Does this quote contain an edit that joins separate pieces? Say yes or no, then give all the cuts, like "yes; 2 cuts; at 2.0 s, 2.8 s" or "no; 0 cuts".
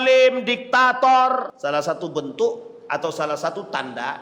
yes; 1 cut; at 1.5 s